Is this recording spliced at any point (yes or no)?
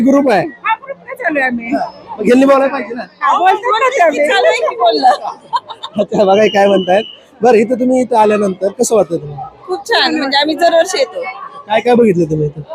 no